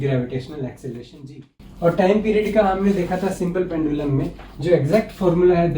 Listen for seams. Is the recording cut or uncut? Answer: cut